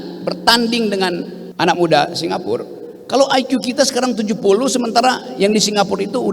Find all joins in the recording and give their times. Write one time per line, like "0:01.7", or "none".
0:01.4